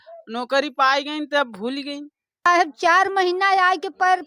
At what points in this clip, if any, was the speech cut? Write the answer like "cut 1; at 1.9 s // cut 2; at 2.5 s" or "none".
cut 1; at 2.5 s